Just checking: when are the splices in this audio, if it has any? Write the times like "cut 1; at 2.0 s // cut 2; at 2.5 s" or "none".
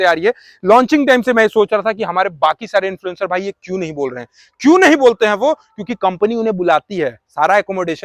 none